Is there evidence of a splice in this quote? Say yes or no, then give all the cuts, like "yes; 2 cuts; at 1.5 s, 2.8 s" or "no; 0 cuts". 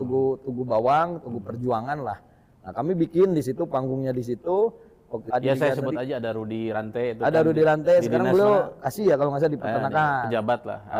yes; 1 cut; at 5.2 s